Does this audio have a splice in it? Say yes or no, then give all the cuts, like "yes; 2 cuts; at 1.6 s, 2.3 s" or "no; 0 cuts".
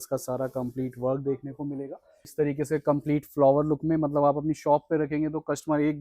yes; 1 cut; at 2.2 s